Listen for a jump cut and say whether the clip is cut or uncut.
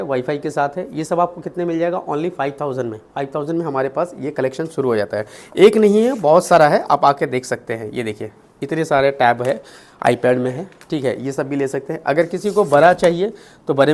uncut